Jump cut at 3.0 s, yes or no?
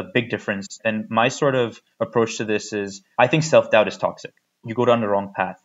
yes